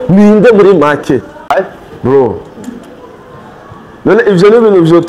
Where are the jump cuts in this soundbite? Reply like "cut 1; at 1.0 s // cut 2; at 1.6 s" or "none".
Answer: cut 1; at 1.5 s